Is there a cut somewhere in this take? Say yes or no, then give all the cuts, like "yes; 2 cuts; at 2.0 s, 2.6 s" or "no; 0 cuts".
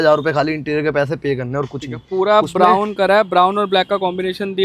no; 0 cuts